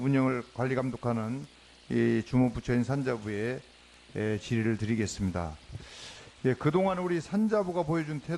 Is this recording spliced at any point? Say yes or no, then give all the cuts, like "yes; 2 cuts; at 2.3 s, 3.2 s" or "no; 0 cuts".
no; 0 cuts